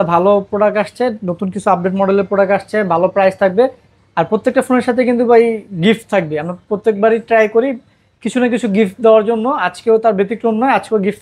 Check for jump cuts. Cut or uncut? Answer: uncut